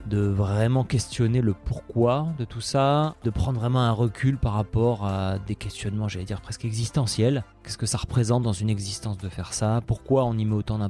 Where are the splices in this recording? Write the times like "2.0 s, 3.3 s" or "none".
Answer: 3.2 s, 7.7 s